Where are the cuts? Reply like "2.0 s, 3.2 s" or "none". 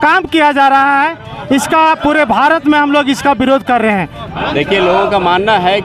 none